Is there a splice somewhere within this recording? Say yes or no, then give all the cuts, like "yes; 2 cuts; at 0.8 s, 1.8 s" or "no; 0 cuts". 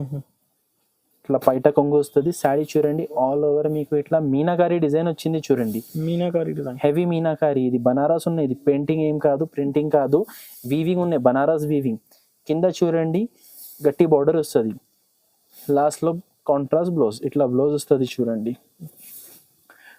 no; 0 cuts